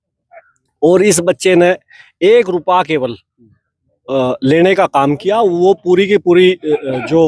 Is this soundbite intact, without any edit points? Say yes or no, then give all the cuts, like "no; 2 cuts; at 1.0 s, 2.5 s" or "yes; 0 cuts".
yes; 0 cuts